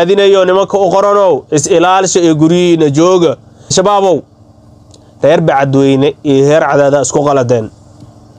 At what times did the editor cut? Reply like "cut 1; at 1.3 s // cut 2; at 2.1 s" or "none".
cut 1; at 3.7 s